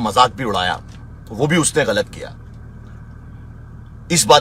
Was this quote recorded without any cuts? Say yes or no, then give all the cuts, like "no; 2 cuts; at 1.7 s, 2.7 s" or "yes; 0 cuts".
yes; 0 cuts